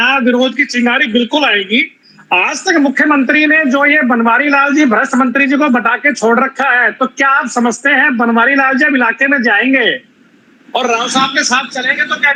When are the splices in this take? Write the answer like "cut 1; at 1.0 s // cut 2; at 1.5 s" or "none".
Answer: none